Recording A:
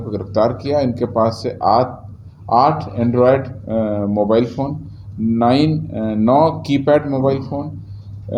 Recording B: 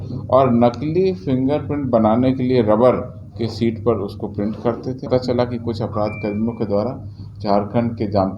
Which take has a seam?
B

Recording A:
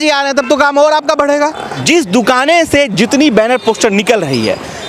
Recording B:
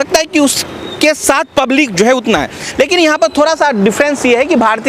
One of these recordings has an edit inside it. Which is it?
A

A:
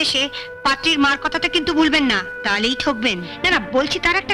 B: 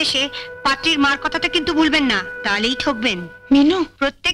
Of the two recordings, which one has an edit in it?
A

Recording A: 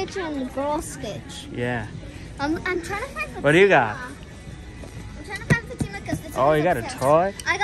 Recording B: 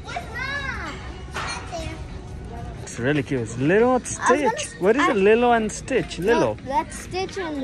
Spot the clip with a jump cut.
B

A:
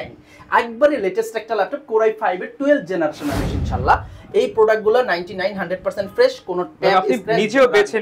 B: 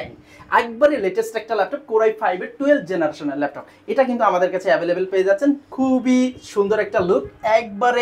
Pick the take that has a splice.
A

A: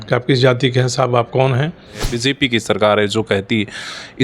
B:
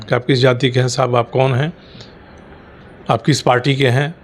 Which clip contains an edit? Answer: A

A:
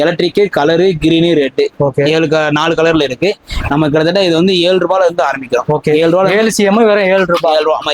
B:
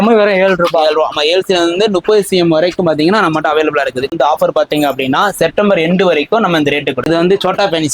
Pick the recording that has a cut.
B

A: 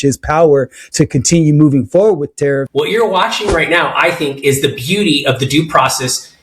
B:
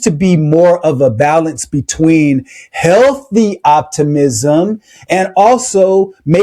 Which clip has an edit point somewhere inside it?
A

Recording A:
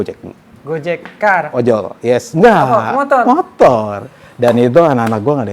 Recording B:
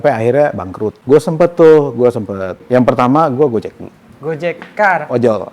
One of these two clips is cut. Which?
B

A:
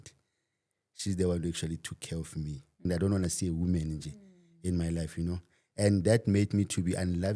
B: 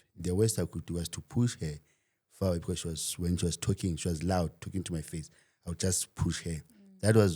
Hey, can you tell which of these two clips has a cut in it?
A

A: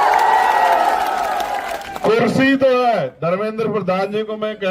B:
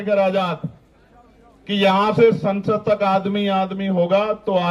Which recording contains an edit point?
A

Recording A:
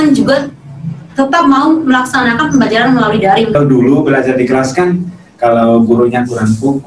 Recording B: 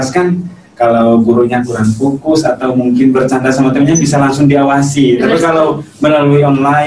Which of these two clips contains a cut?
A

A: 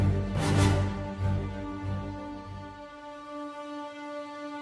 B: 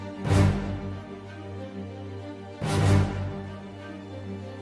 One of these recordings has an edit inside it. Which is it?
B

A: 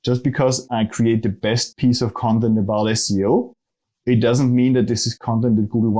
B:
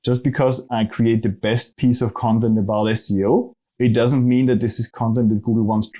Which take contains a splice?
B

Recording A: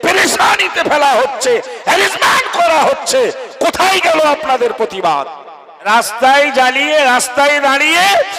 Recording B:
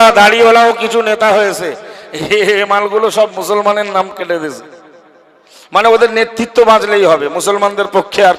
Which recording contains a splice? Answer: A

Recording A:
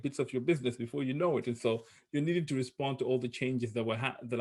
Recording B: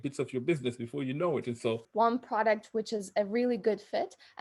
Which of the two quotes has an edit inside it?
B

